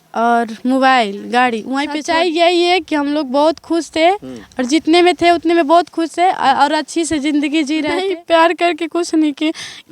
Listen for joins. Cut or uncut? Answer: cut